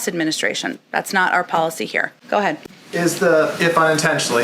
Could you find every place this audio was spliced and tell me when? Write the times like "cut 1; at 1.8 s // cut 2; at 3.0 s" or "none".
none